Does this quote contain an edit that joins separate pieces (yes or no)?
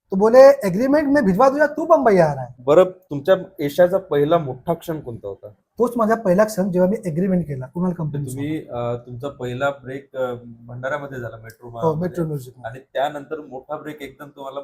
yes